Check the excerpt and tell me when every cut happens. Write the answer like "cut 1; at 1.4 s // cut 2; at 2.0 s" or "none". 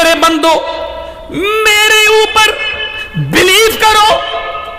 none